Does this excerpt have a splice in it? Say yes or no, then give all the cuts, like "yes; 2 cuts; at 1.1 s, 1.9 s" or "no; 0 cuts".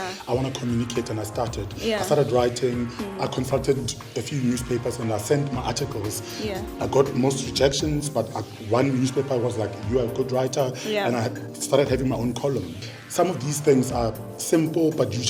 yes; 1 cut; at 12.8 s